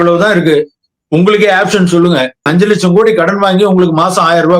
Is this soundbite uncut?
no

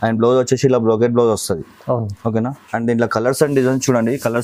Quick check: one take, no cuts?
yes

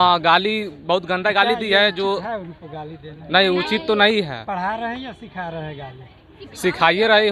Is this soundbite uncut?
yes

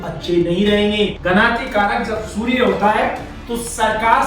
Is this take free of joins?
no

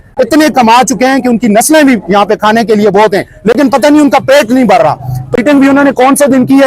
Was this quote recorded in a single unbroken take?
no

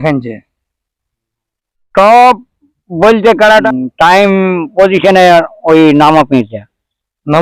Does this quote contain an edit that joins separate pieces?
yes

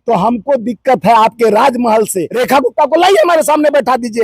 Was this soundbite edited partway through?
yes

